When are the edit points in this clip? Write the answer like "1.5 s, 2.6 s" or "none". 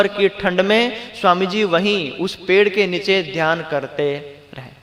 none

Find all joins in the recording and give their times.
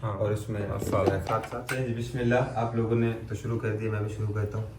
1.3 s

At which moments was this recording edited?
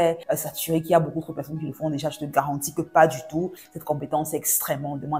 3.6 s

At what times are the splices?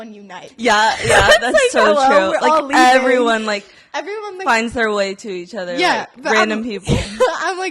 none

